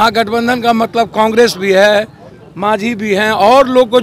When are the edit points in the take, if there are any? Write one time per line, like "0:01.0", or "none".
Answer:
none

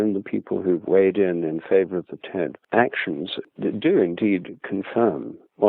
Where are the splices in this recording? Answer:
0:02.6
0:03.4

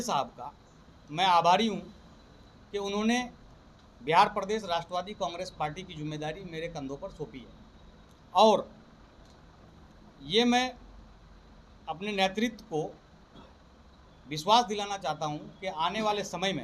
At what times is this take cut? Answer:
none

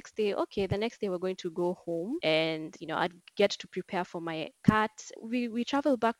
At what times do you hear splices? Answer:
0:02.2
0:05.1

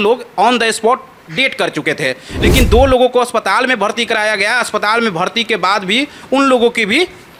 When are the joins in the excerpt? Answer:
none

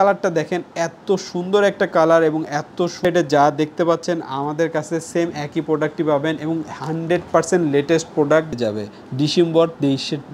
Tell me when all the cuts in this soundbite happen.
0:03.0
0:08.5

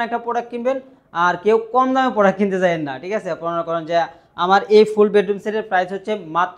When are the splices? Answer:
none

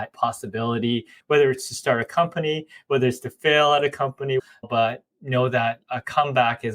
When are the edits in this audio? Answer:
0:01.1
0:04.5

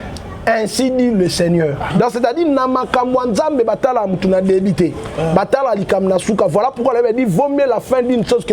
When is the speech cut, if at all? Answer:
0:01.9

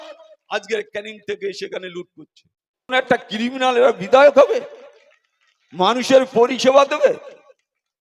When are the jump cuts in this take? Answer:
0:02.9

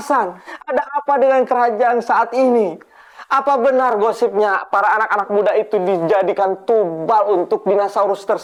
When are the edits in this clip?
none

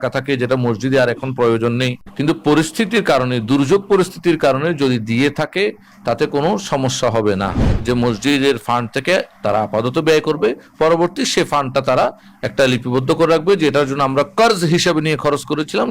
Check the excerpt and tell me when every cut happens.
0:02.0
0:07.7

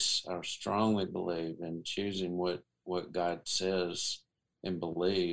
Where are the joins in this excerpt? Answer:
none

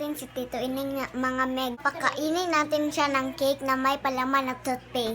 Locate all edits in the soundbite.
0:01.8

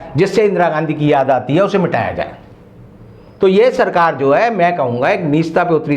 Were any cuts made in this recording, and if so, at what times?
none

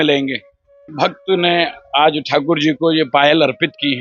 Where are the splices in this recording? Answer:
0:00.9

